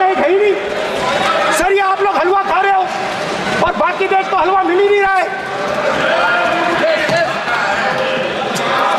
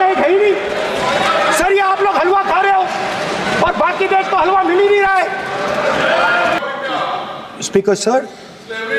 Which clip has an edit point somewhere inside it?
second; 1 cut; at 6.6 s

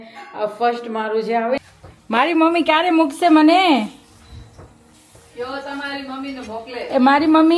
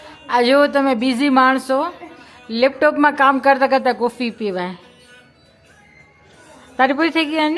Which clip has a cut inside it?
first; 1 cut; at 1.6 s

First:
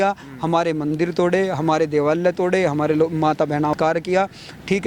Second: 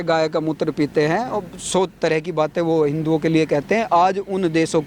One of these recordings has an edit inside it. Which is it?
first; 1 cut; at 3.7 s

